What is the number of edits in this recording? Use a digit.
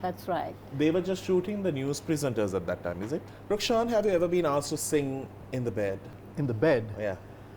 3